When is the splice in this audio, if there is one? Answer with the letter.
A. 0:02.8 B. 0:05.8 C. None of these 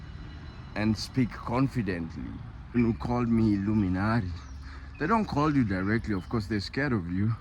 A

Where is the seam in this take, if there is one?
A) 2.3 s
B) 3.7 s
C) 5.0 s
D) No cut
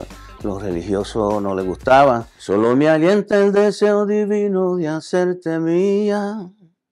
A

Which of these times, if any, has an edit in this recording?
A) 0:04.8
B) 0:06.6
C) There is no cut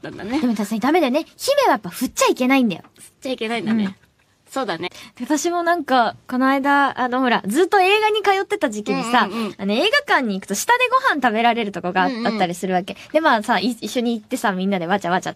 C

